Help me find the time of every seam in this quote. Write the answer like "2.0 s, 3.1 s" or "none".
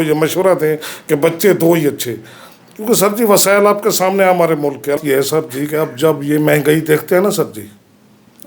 5.0 s